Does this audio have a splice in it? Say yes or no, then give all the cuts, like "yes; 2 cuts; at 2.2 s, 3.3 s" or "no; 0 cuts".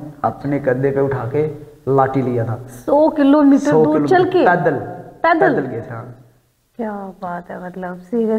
no; 0 cuts